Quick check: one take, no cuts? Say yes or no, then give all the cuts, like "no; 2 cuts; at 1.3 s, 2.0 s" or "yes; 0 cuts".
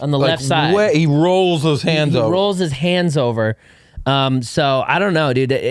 yes; 0 cuts